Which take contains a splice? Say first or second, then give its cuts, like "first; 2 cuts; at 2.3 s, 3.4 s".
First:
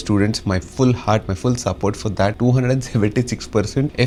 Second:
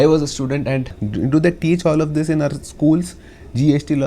second; 1 cut; at 0.9 s